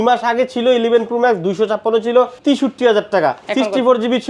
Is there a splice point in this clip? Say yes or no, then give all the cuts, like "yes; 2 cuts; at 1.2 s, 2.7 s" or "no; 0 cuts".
yes; 2 cuts; at 2.3 s, 3.4 s